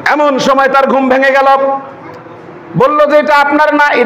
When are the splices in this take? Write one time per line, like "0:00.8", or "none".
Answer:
none